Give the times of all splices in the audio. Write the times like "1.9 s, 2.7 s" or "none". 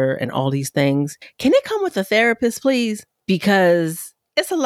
1.2 s, 3.1 s